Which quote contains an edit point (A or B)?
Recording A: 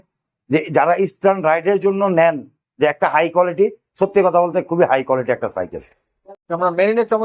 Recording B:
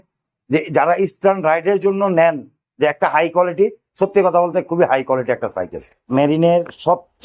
B